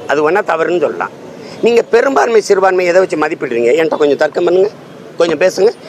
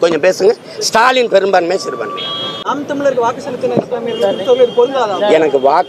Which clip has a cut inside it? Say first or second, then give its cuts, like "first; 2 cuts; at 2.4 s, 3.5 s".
second; 1 cut; at 2.6 s